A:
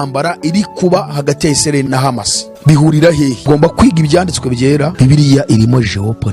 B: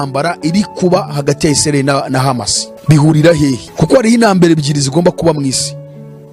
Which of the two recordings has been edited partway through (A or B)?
A